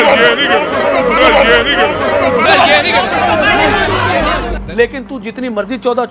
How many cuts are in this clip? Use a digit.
1